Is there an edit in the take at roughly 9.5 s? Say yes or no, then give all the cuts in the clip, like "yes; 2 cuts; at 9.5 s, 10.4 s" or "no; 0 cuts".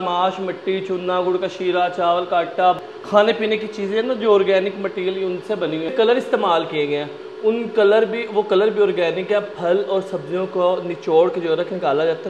no; 2 cuts; at 2.8 s, 5.9 s